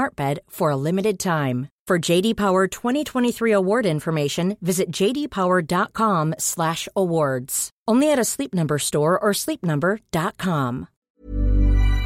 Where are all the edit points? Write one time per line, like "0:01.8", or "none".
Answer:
0:11.1